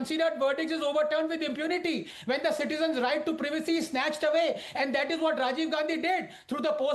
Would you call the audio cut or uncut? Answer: uncut